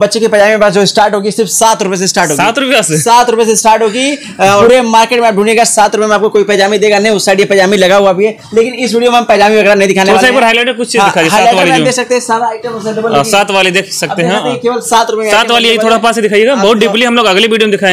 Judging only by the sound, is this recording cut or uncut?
cut